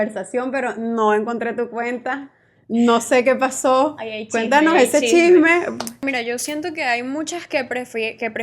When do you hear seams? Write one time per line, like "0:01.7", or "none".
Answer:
0:05.9